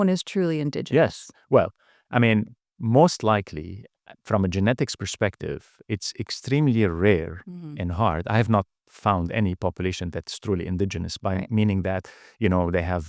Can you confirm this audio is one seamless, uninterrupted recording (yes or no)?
yes